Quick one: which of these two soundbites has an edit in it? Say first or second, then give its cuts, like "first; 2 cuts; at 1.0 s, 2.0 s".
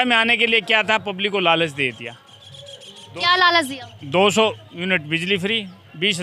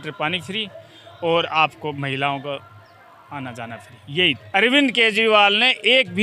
second; 1 cut; at 4.4 s